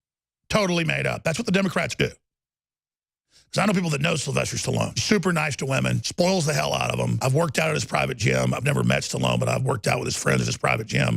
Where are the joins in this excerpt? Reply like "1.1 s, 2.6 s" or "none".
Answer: 5.0 s, 6.1 s, 7.2 s